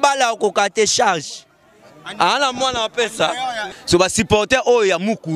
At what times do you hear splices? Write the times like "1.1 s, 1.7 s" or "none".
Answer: 3.7 s